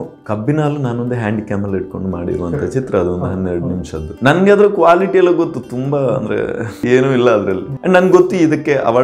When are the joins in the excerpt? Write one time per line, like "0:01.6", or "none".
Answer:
0:04.1
0:06.8
0:07.7